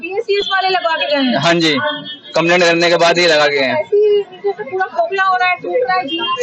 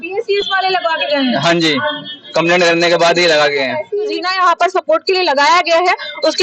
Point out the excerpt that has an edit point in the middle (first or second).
second